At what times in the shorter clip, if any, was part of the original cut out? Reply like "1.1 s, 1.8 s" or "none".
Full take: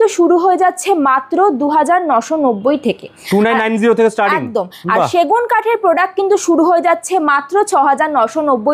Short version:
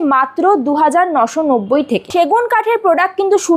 2.1 s